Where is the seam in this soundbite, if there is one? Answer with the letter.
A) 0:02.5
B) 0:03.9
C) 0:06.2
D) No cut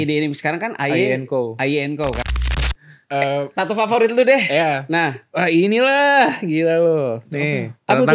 A